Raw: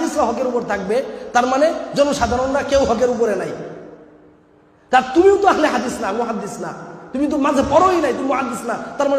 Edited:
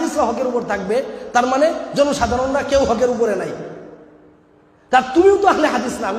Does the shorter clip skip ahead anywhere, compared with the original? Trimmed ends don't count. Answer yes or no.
no